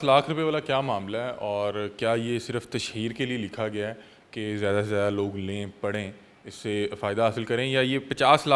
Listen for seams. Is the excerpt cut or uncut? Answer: uncut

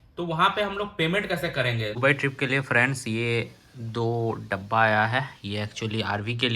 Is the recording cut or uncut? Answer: cut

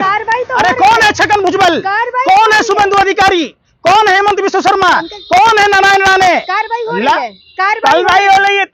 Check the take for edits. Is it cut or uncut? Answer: uncut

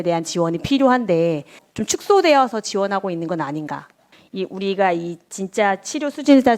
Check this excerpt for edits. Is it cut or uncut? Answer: uncut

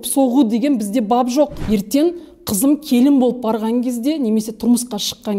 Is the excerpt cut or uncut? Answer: cut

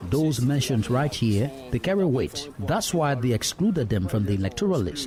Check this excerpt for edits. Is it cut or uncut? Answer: uncut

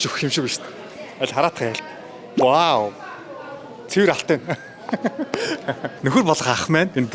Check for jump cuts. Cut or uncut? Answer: uncut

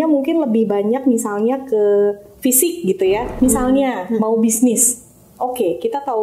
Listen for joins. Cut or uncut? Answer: cut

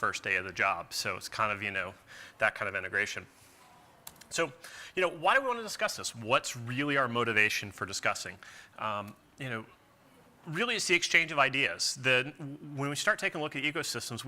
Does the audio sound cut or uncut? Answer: uncut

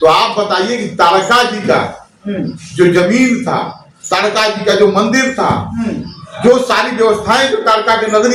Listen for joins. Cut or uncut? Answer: uncut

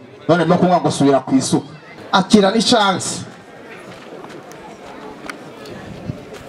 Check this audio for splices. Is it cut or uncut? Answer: cut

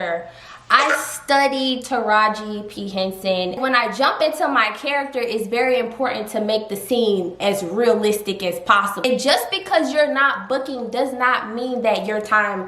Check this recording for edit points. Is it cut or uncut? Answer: cut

